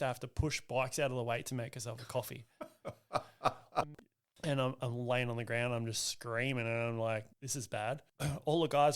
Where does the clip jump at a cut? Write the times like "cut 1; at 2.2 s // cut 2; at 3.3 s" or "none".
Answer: cut 1; at 3.8 s // cut 2; at 7.8 s